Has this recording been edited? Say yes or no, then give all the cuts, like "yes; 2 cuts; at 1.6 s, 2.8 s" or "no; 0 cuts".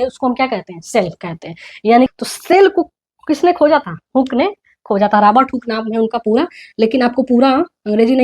yes; 1 cut; at 2.1 s